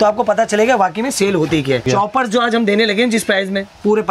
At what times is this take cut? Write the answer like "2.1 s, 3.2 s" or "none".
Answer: 1.9 s